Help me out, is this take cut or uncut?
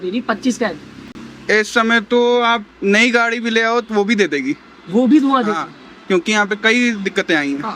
uncut